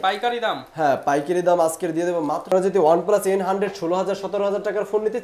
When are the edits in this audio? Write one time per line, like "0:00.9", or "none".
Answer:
0:02.5